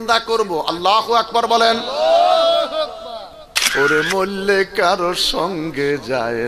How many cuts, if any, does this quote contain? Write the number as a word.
one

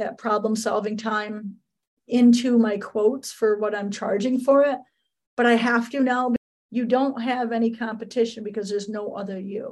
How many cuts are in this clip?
one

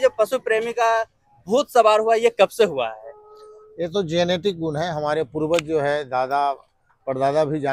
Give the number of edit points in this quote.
zero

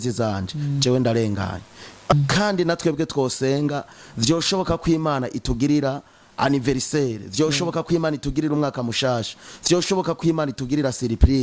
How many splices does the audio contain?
one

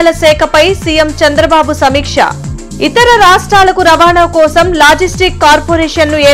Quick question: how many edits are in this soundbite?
zero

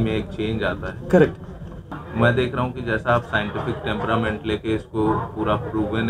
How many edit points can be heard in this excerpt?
one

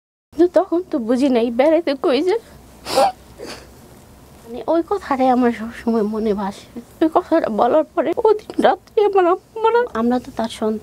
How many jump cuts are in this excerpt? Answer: two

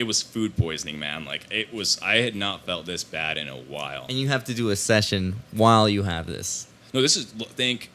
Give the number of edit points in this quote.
zero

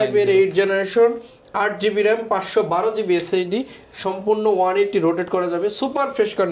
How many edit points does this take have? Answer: zero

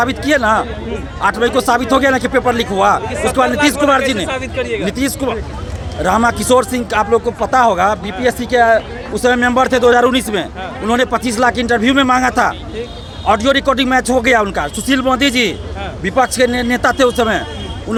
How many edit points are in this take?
zero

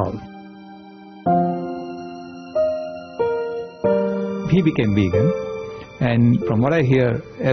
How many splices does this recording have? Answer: zero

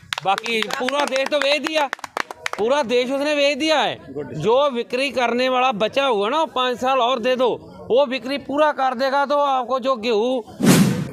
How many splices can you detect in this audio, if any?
zero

